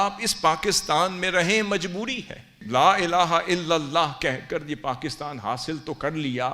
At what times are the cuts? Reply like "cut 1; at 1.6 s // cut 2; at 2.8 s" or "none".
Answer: cut 1; at 2.6 s